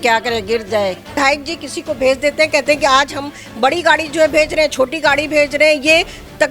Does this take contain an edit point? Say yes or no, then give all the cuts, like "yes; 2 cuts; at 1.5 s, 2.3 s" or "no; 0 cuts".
yes; 1 cut; at 1.2 s